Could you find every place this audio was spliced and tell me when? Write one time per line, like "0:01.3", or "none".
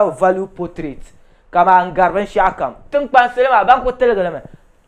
none